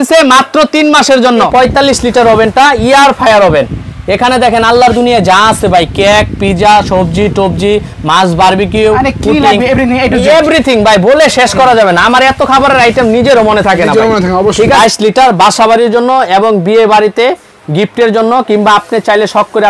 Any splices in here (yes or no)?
yes